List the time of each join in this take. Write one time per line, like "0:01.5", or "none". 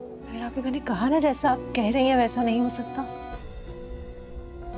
none